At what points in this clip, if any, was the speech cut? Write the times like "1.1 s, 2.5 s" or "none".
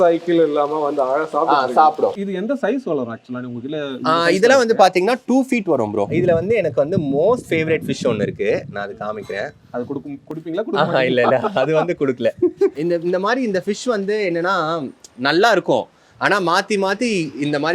2.3 s, 6.1 s, 12.8 s